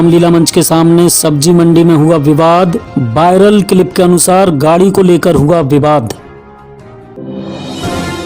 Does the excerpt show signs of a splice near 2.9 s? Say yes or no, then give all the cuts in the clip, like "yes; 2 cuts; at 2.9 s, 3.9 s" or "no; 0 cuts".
no; 1 cut; at 7.1 s